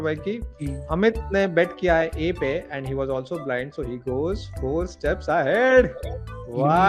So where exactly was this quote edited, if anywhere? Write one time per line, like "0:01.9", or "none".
none